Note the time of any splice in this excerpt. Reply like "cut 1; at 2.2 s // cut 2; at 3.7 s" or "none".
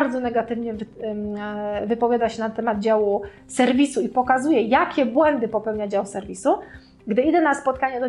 none